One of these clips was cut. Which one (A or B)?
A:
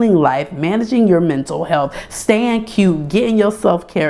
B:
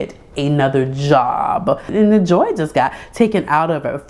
B